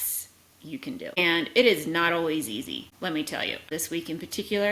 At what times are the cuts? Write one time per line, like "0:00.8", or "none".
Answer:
0:01.2
0:02.9
0:03.7